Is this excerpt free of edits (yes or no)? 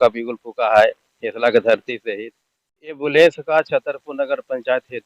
no